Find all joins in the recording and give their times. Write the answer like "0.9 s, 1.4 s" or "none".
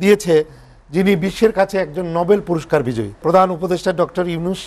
3.2 s